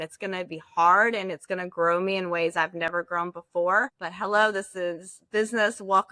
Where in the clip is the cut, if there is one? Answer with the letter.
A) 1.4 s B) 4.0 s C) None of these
B